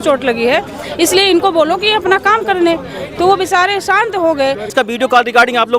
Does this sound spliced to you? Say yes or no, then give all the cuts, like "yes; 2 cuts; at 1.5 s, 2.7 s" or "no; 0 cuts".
yes; 1 cut; at 4.7 s